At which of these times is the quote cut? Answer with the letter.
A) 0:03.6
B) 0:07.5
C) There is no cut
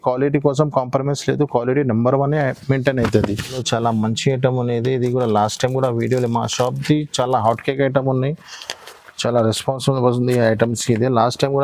A